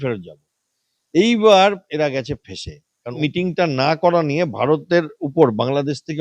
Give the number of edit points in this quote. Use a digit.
1